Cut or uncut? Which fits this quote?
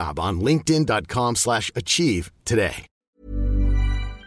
cut